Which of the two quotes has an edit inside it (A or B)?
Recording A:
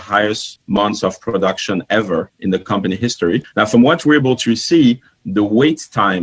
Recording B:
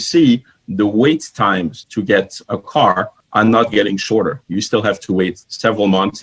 A